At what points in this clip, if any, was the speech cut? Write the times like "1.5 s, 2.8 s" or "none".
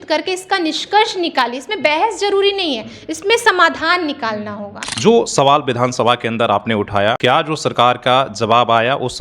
4.8 s, 7.2 s